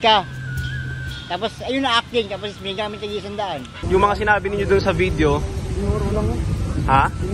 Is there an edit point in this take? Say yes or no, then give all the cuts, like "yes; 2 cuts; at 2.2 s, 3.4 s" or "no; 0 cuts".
yes; 1 cut; at 3.8 s